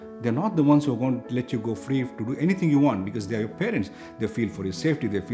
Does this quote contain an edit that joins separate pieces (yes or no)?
no